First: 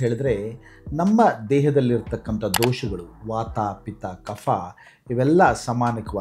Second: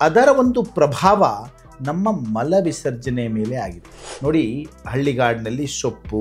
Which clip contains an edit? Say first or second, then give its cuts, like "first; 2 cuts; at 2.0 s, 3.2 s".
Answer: second; 1 cut; at 4.0 s